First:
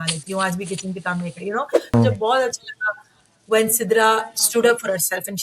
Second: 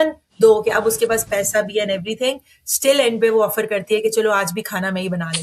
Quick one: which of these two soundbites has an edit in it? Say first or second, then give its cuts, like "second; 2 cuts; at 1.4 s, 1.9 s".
first; 1 cut; at 1.9 s